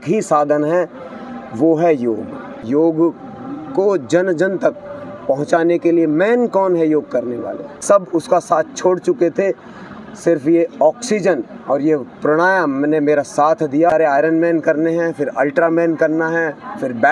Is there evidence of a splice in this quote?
yes; 3 cuts; at 2.7 s, 7.7 s, 13.9 s

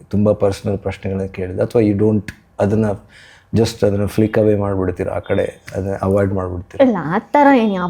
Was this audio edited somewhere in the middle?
no; 0 cuts

